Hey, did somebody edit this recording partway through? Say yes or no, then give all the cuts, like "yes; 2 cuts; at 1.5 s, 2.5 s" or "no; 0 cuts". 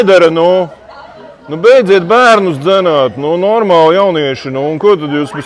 no; 0 cuts